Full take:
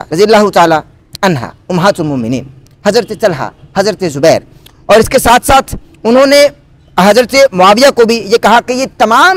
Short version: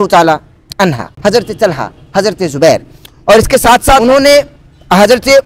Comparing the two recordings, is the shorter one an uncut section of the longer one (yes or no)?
no